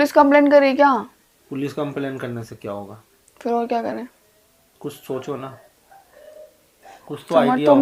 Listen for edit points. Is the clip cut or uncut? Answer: uncut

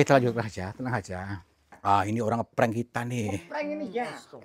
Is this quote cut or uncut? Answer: cut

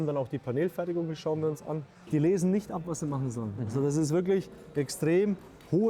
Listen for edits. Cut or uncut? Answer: cut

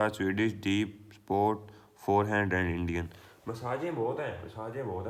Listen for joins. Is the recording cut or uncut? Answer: uncut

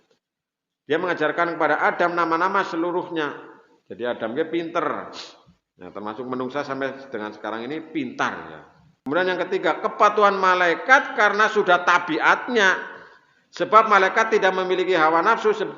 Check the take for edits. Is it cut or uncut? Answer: cut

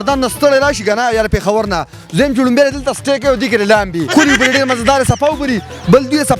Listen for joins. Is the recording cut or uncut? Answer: cut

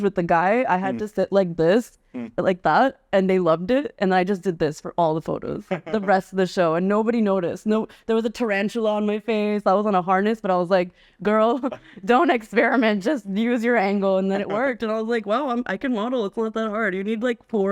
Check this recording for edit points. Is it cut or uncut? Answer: uncut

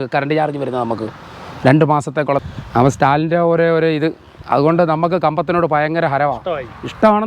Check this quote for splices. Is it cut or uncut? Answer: cut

